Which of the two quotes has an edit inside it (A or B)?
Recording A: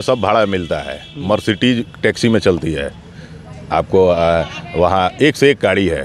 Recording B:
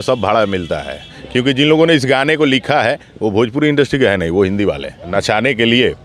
B